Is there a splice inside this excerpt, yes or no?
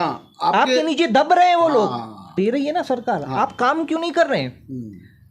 yes